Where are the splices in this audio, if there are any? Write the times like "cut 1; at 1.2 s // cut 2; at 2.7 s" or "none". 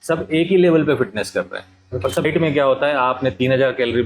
cut 1; at 2.2 s